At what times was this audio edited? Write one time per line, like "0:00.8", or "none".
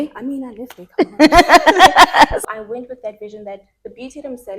0:02.4